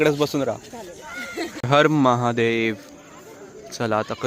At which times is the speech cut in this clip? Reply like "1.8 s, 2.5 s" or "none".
1.6 s